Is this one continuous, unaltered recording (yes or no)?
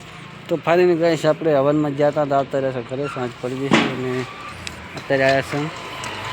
yes